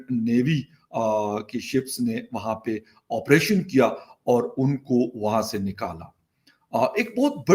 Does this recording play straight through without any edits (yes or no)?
yes